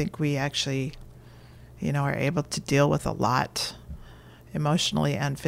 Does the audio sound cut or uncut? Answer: uncut